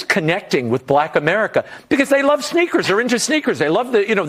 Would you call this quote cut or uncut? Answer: uncut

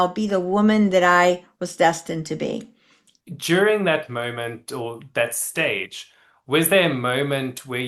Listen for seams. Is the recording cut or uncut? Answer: cut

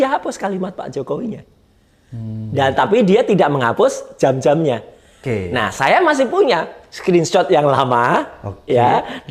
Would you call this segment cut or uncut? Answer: uncut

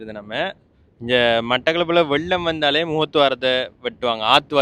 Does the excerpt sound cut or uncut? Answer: uncut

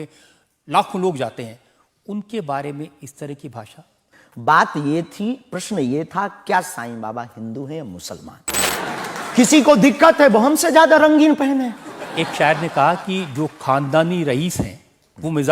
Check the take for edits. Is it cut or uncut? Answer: cut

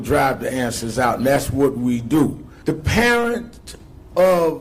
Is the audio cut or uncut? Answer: cut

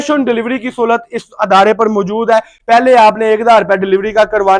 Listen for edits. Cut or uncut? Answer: uncut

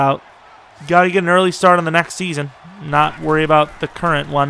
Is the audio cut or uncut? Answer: uncut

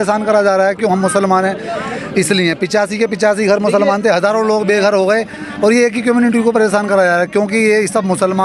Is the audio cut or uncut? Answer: uncut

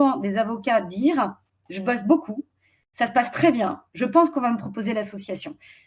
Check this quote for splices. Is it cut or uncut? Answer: uncut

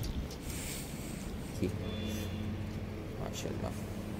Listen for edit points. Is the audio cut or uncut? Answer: cut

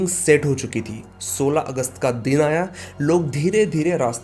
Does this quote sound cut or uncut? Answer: uncut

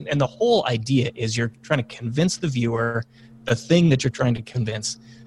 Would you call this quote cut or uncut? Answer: uncut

